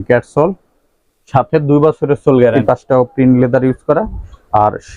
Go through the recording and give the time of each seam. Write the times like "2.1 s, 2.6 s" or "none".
2.6 s